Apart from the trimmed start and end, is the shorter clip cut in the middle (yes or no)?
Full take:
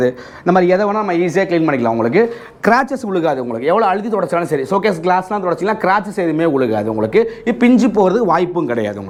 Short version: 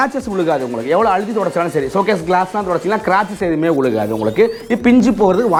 no